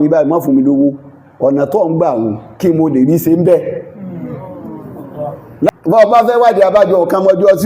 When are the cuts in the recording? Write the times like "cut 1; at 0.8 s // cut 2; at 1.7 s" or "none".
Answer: cut 1; at 5.7 s

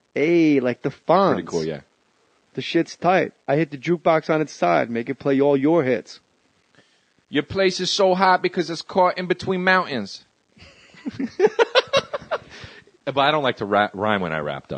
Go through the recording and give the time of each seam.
none

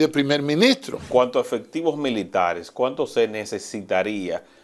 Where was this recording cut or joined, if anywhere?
cut 1; at 1.1 s

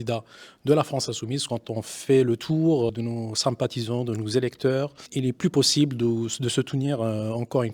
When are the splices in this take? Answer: cut 1; at 1.4 s // cut 2; at 2.9 s

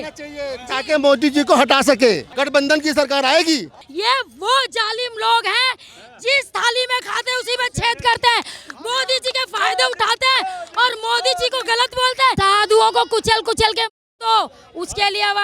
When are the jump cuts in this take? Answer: cut 1; at 2.3 s // cut 2; at 3.8 s // cut 3; at 12.3 s

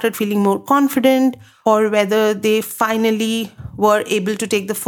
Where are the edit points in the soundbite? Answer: cut 1; at 1.5 s

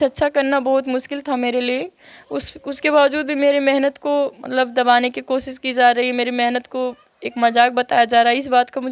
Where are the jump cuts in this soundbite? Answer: none

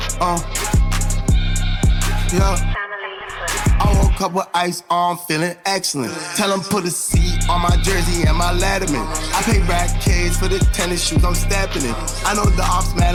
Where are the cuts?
none

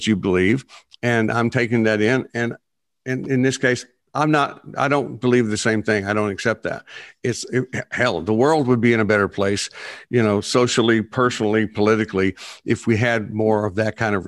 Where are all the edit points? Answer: none

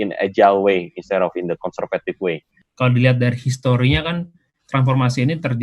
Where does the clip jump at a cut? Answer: cut 1; at 2.6 s

